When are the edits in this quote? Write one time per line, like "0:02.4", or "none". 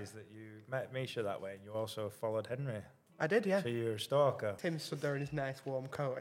0:04.6